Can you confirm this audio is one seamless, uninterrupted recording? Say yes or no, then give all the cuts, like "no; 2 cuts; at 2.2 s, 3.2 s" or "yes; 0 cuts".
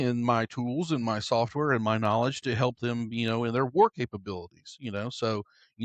yes; 0 cuts